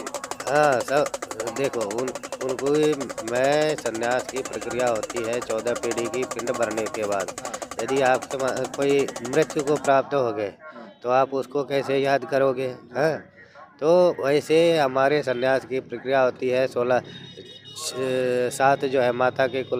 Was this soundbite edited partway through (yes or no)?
no